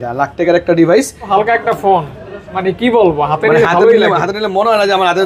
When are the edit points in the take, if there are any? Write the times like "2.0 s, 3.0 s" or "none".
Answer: 1.3 s

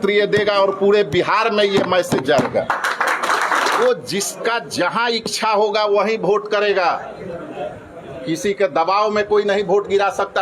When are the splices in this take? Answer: 3.8 s

